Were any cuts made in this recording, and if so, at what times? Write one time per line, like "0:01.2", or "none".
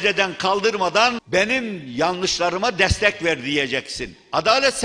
0:01.2

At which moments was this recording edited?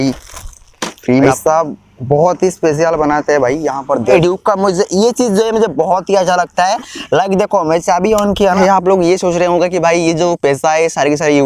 0:01.3
0:04.2
0:08.6

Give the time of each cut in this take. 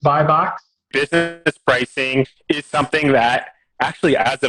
0:00.9

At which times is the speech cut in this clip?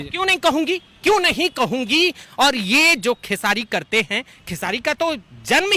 0:02.2

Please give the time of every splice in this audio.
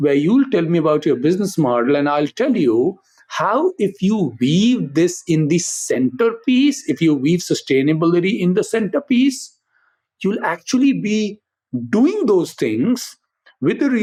none

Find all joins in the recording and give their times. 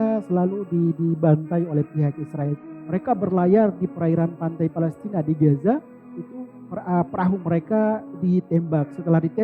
0:02.7

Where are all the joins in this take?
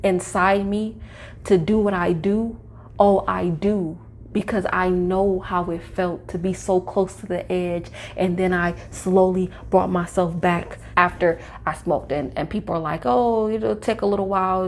0:10.8

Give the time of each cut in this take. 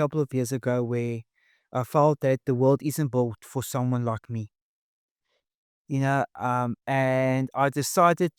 none

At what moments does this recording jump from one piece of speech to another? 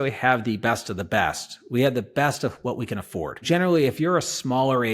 0:03.4

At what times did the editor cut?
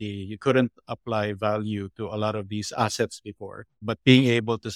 0:03.7

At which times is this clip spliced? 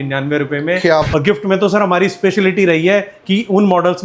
0:01.1

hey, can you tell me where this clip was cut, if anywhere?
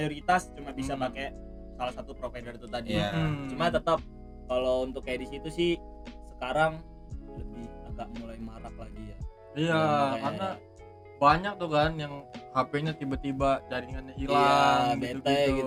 none

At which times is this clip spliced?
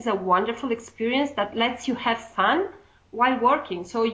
0:03.0

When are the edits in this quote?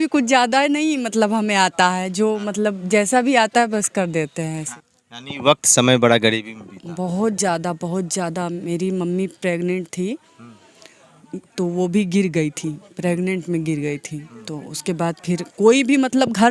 0:04.7

